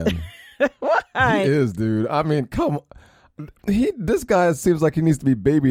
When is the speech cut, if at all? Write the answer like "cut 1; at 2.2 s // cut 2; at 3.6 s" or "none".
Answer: none